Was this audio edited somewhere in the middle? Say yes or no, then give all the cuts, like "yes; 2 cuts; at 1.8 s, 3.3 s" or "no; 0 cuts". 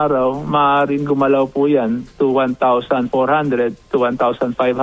no; 0 cuts